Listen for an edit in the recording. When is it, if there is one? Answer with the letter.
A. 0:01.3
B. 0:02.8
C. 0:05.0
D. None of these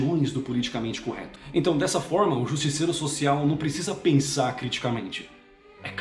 A